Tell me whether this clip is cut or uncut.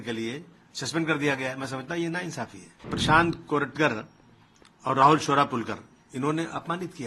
cut